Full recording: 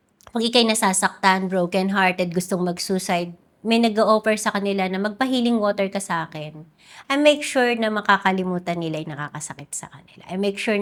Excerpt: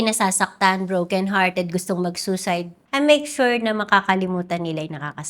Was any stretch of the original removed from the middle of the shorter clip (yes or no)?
yes